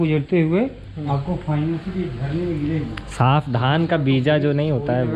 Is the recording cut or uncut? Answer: uncut